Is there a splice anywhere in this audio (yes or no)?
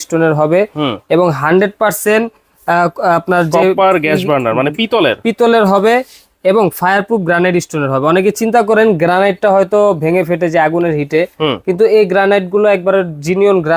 no